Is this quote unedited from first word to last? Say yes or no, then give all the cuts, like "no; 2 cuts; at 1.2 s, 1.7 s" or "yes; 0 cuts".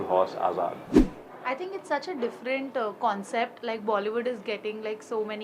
yes; 0 cuts